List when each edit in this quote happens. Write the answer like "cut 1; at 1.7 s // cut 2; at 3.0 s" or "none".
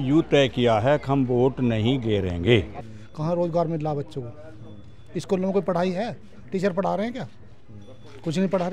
cut 1; at 2.8 s

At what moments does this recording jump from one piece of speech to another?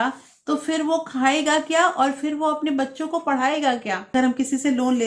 cut 1; at 4.0 s

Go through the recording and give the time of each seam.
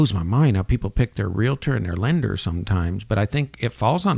none

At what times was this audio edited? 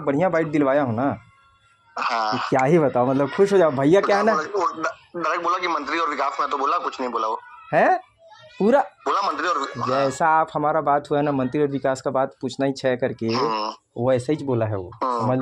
none

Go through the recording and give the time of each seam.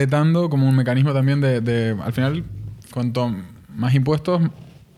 none

